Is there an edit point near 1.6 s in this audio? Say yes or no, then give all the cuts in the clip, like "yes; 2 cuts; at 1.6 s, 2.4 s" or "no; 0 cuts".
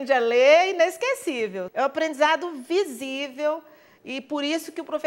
yes; 1 cut; at 1.6 s